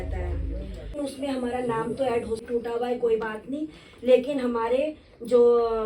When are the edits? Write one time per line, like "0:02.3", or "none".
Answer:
0:01.0
0:02.4